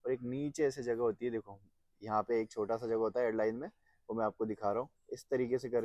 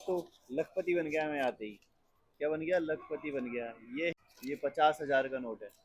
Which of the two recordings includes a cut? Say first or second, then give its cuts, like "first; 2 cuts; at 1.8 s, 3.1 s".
second; 1 cut; at 4.1 s